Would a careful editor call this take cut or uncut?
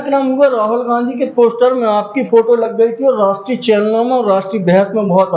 uncut